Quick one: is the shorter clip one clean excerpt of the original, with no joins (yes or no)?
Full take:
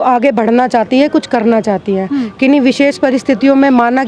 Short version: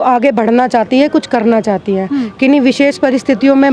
yes